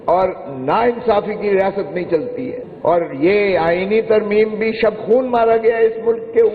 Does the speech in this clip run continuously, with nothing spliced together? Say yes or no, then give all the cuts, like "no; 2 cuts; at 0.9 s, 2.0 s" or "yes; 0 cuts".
no; 1 cut; at 2.5 s